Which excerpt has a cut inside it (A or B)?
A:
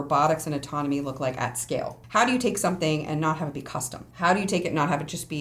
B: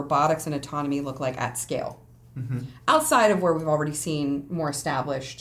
A